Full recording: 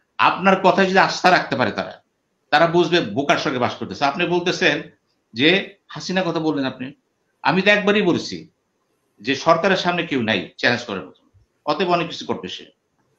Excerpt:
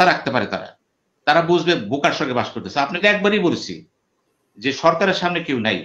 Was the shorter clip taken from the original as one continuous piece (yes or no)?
no